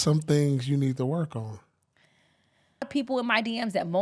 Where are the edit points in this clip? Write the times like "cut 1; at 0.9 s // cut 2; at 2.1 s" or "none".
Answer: cut 1; at 2.9 s